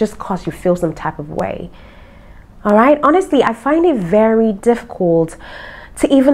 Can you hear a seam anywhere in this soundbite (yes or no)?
no